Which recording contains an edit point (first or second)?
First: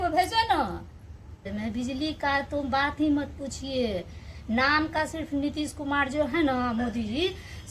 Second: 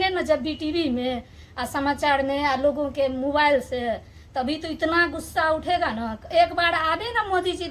first